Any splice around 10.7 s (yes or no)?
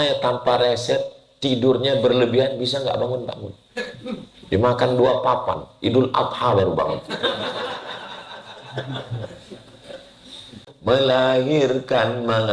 yes